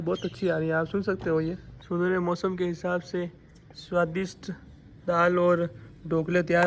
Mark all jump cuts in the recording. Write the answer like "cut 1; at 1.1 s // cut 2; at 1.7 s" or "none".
cut 1; at 1.7 s